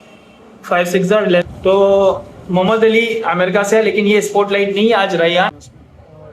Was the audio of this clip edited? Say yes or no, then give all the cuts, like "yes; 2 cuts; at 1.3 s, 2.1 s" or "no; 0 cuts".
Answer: yes; 2 cuts; at 1.4 s, 5.5 s